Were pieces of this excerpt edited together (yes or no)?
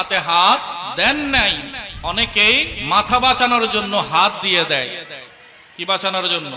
yes